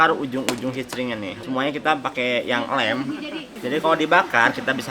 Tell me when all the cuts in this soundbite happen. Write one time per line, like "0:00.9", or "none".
0:01.4